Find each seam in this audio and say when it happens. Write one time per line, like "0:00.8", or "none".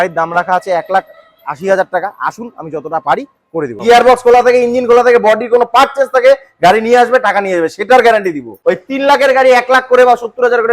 0:03.8
0:08.5